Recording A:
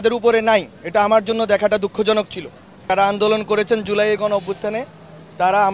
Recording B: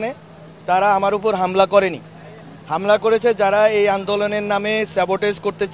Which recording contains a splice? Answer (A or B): A